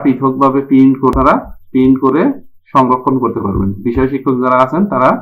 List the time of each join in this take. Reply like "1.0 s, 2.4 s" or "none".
1.1 s